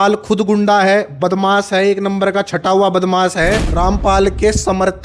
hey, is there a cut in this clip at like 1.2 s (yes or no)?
no